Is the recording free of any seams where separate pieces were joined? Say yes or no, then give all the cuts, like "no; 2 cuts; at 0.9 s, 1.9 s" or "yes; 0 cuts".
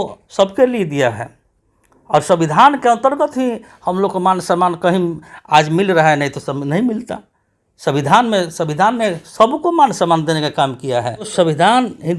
yes; 0 cuts